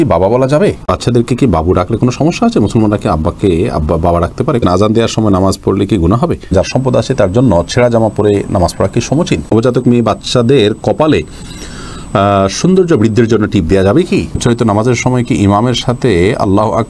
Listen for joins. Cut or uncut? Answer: cut